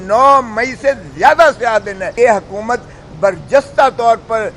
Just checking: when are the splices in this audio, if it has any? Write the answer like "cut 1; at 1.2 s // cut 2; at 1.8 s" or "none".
cut 1; at 2.1 s